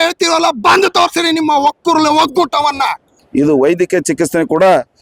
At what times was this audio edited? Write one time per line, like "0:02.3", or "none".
0:03.2